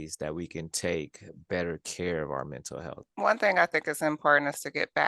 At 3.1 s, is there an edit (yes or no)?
yes